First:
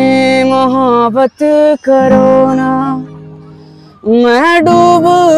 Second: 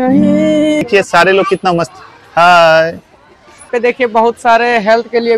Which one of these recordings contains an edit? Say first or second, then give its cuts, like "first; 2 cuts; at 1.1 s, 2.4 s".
second; 2 cuts; at 0.8 s, 3.7 s